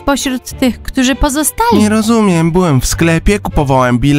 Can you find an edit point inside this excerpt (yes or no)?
yes